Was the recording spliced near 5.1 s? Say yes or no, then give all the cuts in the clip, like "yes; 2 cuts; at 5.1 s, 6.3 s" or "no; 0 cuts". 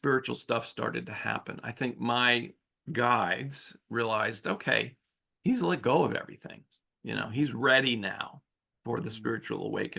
no; 0 cuts